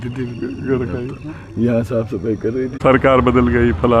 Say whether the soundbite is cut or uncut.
cut